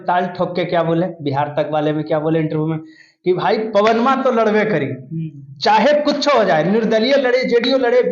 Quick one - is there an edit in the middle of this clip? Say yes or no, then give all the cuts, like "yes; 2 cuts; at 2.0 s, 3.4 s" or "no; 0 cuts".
no; 0 cuts